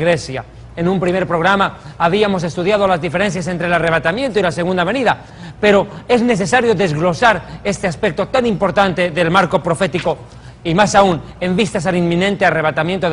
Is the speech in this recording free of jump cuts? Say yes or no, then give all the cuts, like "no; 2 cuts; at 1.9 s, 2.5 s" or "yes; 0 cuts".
no; 1 cut; at 6.7 s